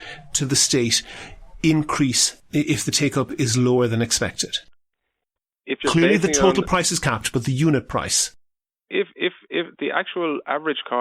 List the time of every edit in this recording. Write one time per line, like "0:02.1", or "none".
none